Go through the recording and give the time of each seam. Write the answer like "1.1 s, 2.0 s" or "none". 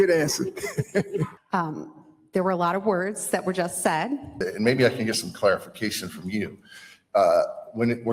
1.4 s, 4.4 s